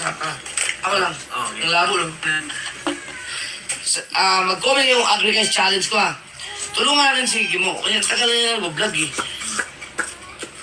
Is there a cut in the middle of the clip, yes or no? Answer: no